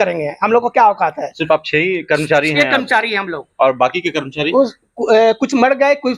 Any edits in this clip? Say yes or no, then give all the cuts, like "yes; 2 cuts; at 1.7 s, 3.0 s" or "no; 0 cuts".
no; 0 cuts